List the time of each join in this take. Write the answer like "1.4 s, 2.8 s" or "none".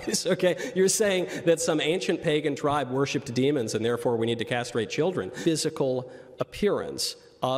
5.3 s